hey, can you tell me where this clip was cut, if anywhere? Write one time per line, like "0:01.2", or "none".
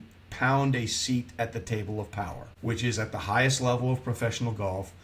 0:02.4

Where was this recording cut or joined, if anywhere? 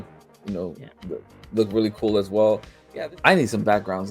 0:02.8

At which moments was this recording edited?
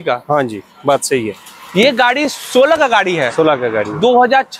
none

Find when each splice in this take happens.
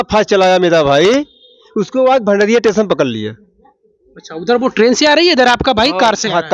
none

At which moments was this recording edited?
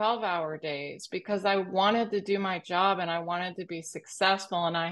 none

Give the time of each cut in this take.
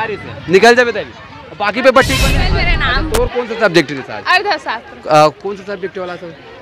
0:02.7

